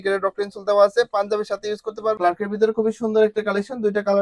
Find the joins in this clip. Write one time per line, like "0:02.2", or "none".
0:02.2